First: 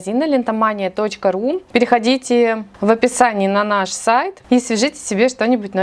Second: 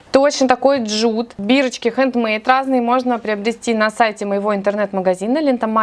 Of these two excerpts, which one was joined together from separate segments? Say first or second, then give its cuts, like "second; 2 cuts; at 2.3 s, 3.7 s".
first; 3 cuts; at 1.6 s, 2.7 s, 4.4 s